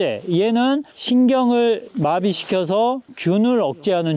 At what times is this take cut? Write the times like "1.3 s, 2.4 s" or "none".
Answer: none